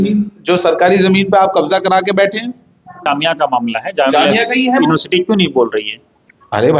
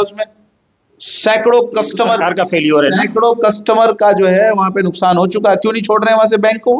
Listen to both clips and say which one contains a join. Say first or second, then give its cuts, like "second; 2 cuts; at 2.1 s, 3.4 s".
first; 1 cut; at 2.9 s